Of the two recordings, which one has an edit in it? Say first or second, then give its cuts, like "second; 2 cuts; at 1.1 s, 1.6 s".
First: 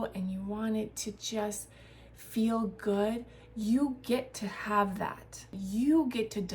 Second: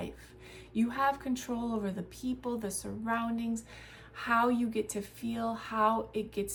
first; 1 cut; at 5.6 s